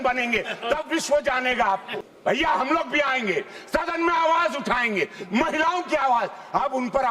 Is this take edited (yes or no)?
yes